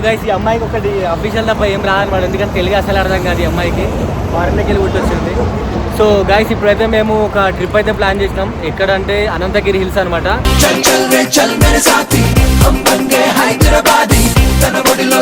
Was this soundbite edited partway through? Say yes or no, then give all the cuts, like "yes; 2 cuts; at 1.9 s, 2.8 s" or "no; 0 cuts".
no; 0 cuts